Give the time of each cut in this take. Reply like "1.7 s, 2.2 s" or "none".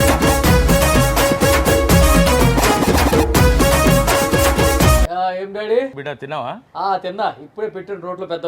5.0 s, 6.0 s